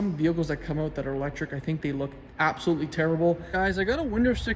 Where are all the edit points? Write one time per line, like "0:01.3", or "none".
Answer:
0:03.5